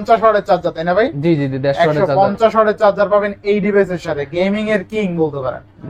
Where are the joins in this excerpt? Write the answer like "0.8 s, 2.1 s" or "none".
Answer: none